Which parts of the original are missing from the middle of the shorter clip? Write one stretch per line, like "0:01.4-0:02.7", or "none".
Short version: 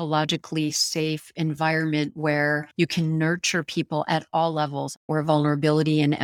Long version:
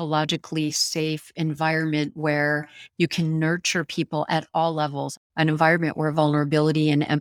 0:02.7-0:02.9
0:05.3-0:05.9

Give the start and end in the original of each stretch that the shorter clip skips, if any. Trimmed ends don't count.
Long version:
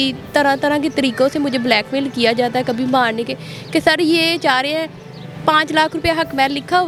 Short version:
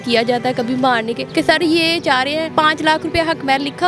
0:03.3-0:03.6
0:04.9-0:05.4

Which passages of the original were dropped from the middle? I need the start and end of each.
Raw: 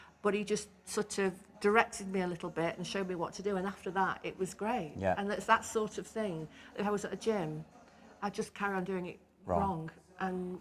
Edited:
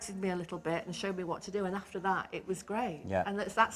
none

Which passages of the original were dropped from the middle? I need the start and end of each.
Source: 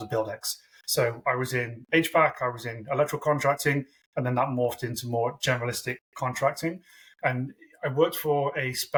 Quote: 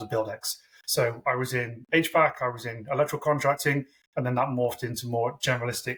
none

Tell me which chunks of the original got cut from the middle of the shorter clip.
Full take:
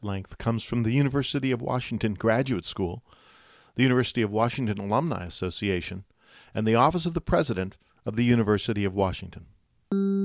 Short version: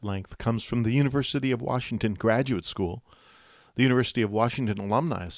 none

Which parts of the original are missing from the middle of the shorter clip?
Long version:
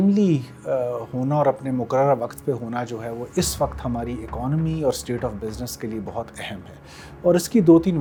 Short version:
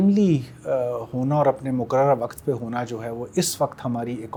none

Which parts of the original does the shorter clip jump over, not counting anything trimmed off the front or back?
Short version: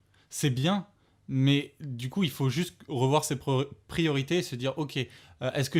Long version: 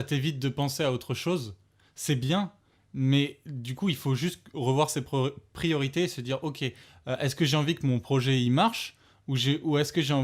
none

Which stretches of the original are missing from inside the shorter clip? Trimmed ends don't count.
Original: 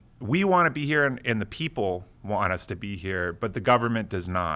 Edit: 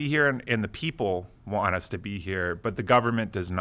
none

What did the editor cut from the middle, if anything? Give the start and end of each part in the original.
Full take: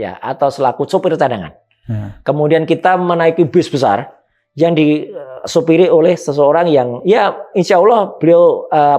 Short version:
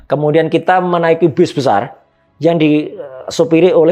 none

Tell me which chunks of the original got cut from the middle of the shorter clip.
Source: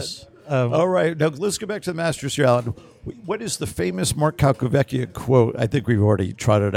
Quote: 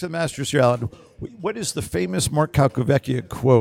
none

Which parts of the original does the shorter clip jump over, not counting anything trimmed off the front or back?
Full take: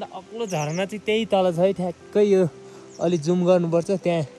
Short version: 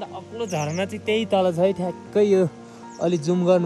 none

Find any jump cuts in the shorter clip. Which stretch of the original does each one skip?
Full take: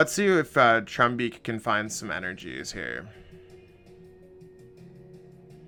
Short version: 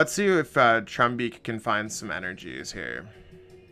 none

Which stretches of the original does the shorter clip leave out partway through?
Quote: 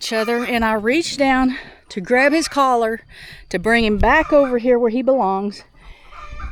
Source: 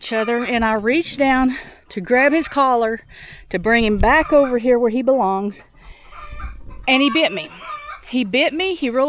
none

